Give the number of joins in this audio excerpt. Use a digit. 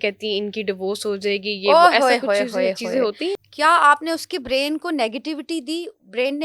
1